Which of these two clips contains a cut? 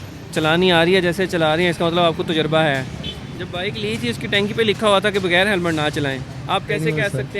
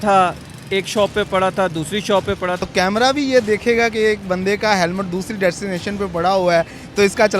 second; 1 cut; at 2.6 s

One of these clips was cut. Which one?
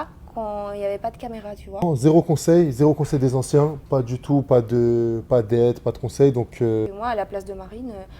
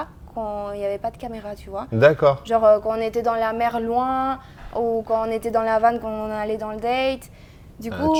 first; 2 cuts; at 1.9 s, 6.9 s

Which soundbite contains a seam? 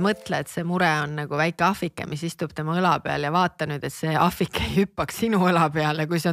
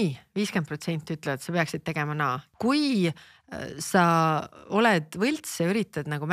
second; 1 cut; at 2.4 s

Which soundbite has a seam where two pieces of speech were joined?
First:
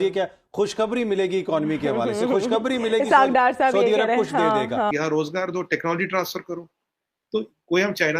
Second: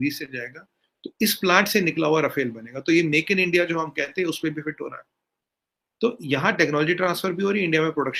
first; 1 cut; at 4.9 s

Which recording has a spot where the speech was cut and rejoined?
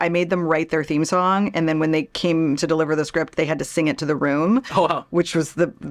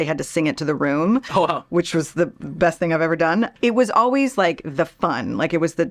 second; 1 cut; at 3.5 s

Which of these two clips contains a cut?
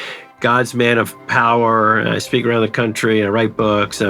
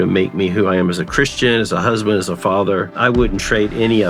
second; 1 cut; at 2.9 s

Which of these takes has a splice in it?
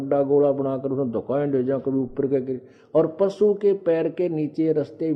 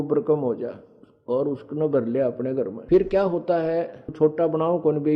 second; 2 cuts; at 2.8 s, 4.1 s

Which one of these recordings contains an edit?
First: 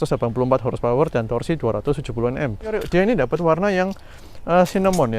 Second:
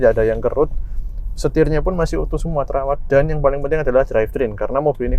first; 1 cut; at 2.8 s

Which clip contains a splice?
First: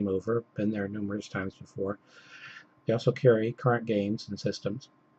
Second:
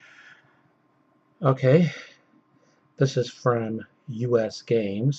first; 1 cut; at 3.7 s

